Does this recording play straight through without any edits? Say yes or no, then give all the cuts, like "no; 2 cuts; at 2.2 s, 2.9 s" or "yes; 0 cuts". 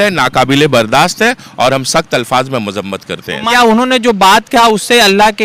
no; 1 cut; at 3.4 s